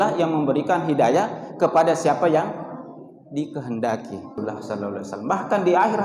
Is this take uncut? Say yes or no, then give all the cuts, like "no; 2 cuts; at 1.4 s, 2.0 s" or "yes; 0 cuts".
no; 1 cut; at 4.4 s